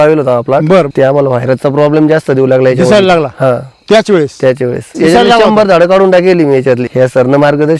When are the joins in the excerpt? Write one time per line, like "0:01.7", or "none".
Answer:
0:00.9
0:04.9
0:06.9